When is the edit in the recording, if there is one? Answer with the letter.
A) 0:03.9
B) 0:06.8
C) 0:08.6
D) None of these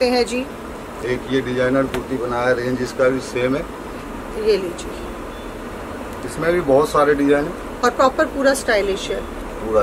A